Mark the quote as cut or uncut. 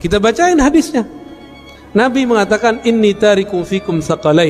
uncut